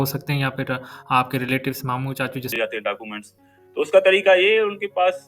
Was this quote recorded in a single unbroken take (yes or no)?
no